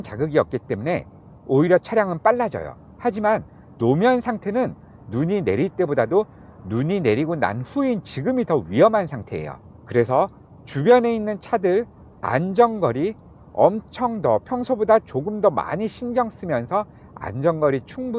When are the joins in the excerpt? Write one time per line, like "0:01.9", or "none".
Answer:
none